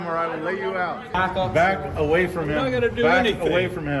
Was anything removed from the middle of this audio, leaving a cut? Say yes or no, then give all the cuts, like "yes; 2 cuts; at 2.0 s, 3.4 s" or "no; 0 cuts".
yes; 1 cut; at 1.1 s